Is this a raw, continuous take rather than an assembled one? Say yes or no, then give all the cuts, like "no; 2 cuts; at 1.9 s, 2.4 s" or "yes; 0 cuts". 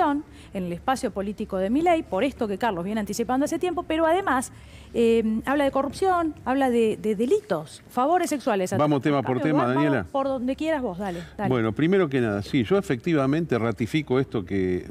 yes; 0 cuts